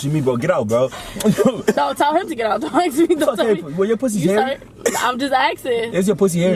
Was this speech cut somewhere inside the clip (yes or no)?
no